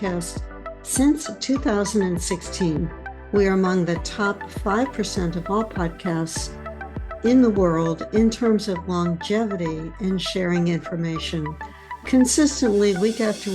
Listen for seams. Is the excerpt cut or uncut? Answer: uncut